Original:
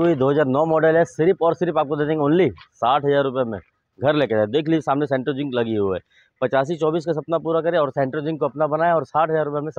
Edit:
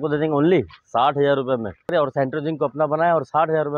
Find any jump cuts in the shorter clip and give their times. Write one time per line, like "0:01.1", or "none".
0:01.9